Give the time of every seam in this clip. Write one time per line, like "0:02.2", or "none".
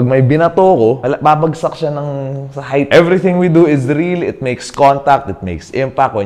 0:01.0
0:02.9